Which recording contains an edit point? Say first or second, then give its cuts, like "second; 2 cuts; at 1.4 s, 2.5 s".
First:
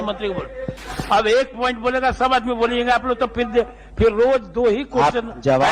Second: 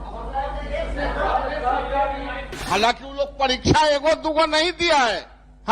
second; 1 cut; at 2.5 s